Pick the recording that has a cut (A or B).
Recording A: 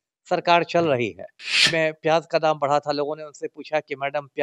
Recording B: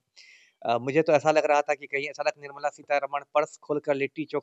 A